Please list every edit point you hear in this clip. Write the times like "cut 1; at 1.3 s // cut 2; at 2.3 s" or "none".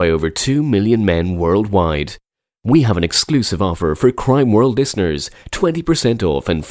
none